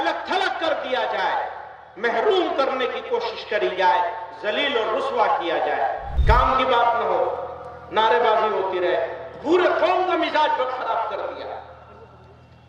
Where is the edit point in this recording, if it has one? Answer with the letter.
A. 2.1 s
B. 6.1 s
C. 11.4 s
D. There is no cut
B